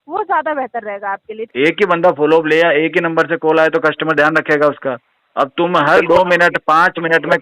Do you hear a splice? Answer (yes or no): yes